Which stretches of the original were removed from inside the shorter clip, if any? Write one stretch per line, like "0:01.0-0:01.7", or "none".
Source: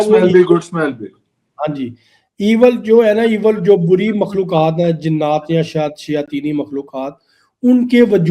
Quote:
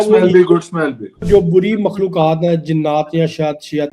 0:01.2-0:03.6